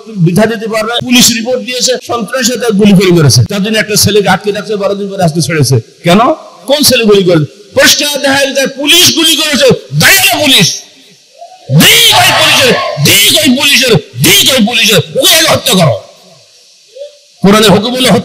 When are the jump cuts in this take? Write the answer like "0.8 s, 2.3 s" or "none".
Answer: 1.1 s, 2.1 s, 3.5 s